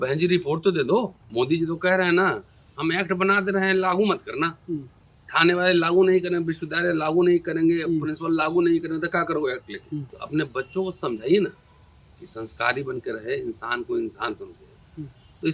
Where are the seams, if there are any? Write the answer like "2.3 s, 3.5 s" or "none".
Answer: 1.2 s, 10.1 s

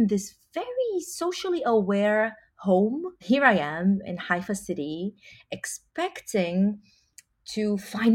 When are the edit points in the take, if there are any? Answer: 3.1 s

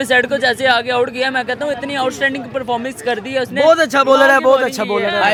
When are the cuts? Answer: none

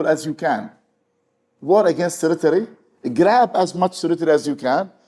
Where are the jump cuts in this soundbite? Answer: none

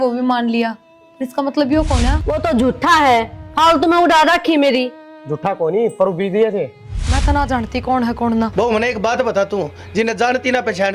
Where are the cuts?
2.2 s, 6.9 s

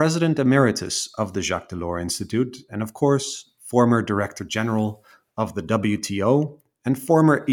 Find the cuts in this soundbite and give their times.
none

